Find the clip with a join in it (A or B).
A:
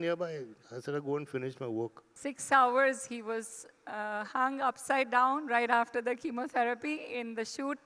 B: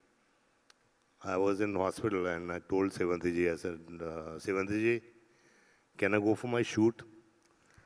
A